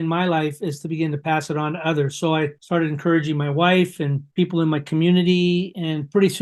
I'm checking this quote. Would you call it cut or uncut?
uncut